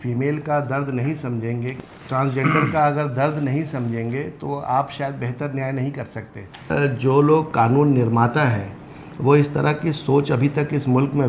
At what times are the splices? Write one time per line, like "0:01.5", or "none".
0:01.7
0:06.7